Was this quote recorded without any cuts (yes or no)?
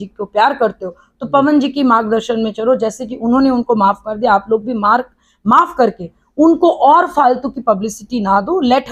yes